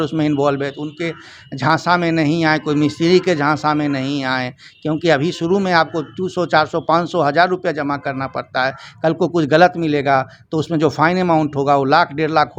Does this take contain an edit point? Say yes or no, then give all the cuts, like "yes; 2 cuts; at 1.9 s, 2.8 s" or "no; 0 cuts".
no; 0 cuts